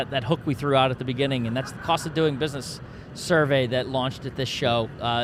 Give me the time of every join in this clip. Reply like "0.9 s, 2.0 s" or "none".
none